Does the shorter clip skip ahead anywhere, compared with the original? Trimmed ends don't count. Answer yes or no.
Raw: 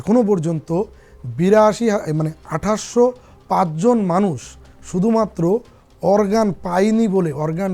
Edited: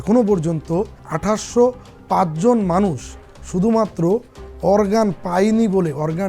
yes